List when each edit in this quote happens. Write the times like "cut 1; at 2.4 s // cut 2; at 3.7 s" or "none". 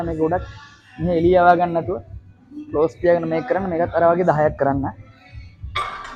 none